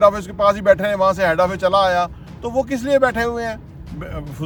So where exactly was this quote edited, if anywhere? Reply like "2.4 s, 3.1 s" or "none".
none